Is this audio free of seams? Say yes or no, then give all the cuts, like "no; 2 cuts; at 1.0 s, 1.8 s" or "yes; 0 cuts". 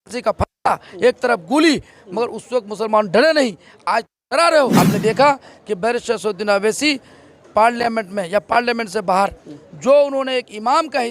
no; 1 cut; at 4.7 s